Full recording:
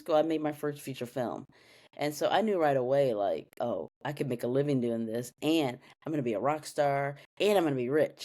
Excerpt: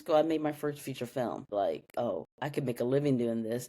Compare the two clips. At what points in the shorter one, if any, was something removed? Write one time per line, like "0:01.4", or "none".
0:01.5